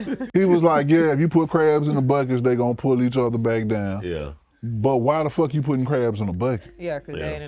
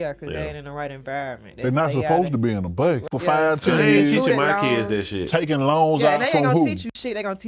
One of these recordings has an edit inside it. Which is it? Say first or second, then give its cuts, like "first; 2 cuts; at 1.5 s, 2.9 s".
second; 1 cut; at 3.1 s